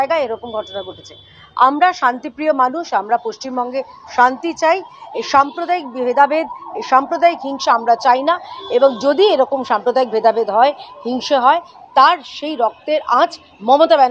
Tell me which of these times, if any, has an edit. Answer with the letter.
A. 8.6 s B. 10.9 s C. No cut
C